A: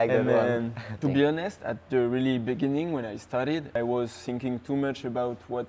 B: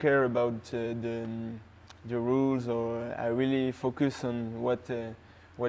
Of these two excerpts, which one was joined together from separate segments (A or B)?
A